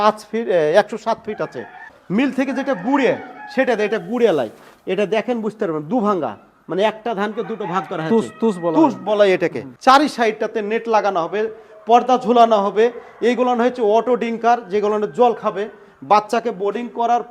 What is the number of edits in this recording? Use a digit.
2